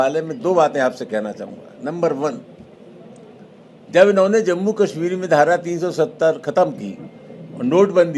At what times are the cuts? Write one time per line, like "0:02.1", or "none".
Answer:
none